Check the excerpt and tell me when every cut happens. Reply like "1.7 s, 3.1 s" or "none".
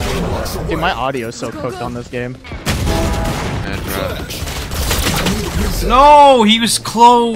2.5 s, 3.6 s